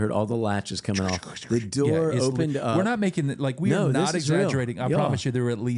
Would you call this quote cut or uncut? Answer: uncut